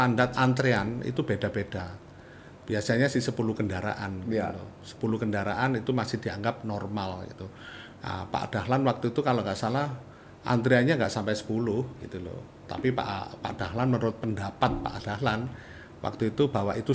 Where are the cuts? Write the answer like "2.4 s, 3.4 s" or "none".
none